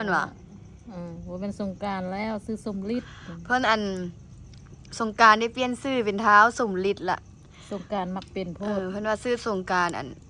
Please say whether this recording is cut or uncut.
uncut